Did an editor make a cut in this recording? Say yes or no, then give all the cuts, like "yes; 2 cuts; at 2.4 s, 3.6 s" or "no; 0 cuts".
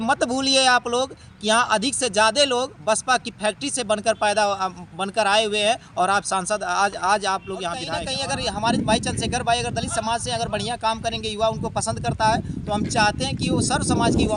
yes; 1 cut; at 7.9 s